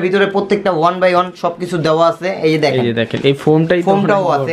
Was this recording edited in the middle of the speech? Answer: no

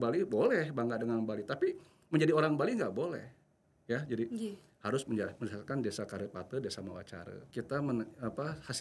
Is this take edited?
yes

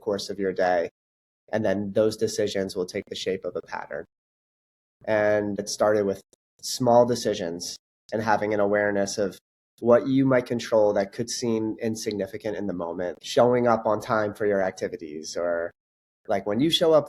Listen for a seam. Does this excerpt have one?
yes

